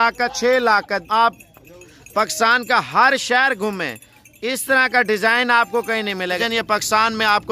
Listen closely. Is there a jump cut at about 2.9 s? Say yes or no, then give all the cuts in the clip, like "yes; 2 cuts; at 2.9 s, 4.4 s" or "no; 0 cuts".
no; 2 cuts; at 1.0 s, 6.4 s